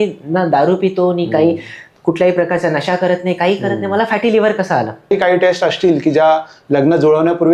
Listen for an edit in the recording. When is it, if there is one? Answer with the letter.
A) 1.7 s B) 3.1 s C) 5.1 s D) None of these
C